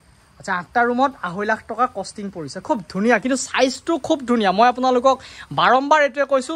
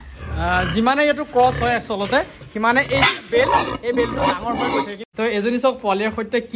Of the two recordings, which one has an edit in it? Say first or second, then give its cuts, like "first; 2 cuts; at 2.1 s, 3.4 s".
second; 1 cut; at 5.0 s